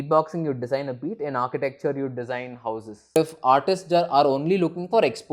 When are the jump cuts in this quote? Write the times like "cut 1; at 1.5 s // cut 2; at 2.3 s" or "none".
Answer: cut 1; at 3.2 s

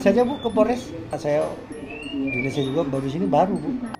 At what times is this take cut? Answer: none

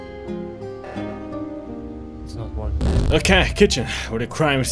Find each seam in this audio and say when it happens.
cut 1; at 3.0 s

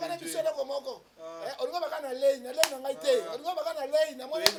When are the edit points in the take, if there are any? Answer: none

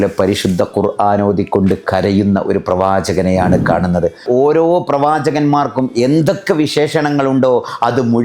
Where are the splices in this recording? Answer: cut 1; at 4.2 s

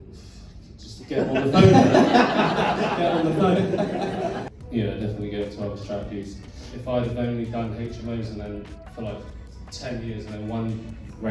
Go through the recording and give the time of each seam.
cut 1; at 4.5 s // cut 2; at 6.4 s

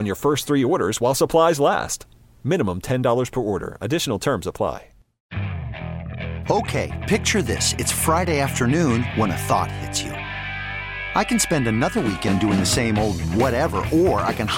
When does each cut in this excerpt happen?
cut 1; at 5.1 s

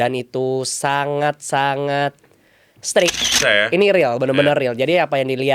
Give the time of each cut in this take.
cut 1; at 3.4 s

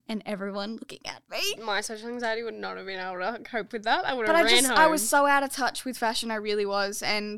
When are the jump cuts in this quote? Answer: cut 1; at 1.6 s

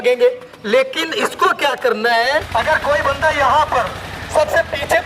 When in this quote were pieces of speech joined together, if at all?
cut 1; at 2.5 s

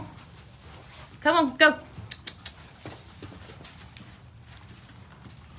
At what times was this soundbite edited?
none

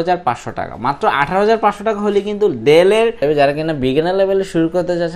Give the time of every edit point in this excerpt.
cut 1; at 3.2 s

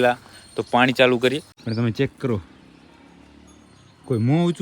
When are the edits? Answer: cut 1; at 1.5 s

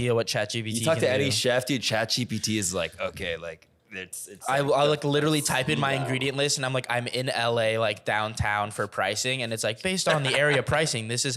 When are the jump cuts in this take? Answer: none

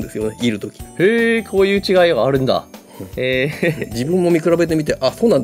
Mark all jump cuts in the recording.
none

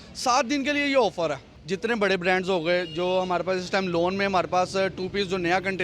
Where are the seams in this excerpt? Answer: cut 1; at 1.5 s

